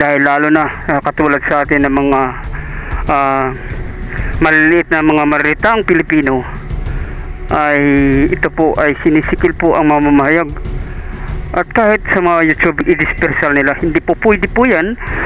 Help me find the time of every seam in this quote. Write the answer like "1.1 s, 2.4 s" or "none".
12.8 s